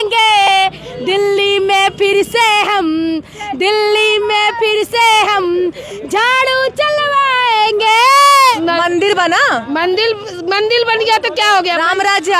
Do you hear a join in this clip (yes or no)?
yes